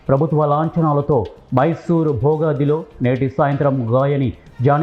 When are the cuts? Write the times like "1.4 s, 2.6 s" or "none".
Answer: none